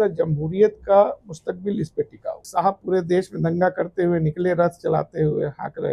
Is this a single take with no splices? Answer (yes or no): no